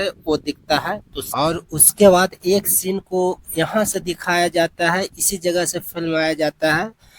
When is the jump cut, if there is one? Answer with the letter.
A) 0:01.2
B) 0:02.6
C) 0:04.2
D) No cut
A